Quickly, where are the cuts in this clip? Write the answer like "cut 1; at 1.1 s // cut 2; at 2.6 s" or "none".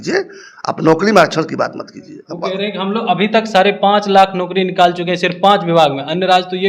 none